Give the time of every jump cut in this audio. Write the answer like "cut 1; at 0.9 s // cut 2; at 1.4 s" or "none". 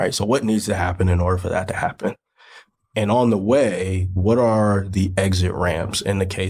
cut 1; at 4.1 s

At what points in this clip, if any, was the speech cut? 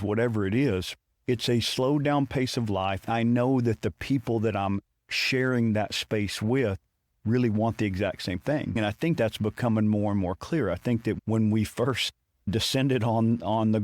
cut 1; at 3.0 s // cut 2; at 8.8 s

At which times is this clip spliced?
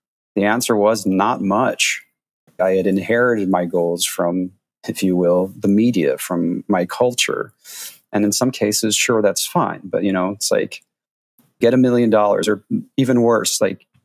cut 1; at 2.6 s // cut 2; at 11.6 s

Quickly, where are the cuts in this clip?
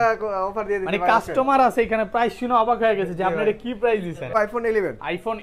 cut 1; at 4.3 s

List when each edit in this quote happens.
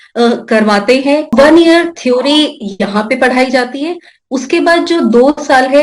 cut 1; at 1.3 s

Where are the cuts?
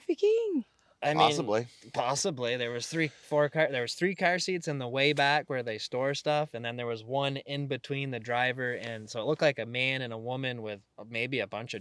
none

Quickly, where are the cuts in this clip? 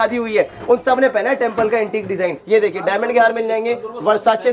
cut 1; at 2.4 s

